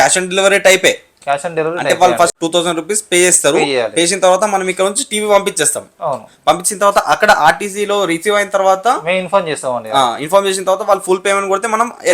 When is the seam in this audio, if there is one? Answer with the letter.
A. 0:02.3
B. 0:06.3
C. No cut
A